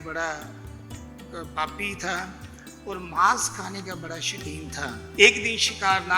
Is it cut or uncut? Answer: cut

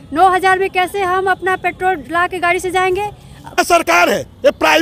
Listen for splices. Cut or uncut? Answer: cut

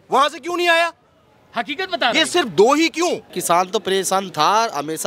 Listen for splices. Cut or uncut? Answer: cut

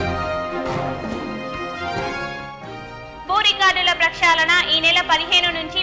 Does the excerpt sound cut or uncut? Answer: cut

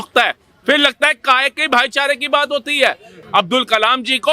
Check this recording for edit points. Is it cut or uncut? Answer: cut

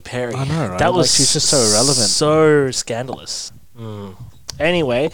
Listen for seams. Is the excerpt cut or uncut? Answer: cut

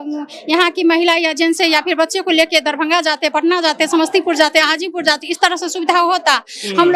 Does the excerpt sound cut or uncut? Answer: uncut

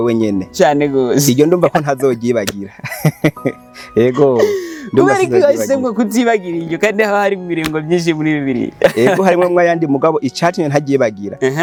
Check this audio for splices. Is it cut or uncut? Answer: uncut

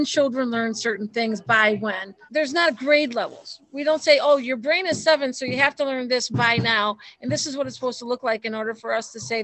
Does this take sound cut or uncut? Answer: cut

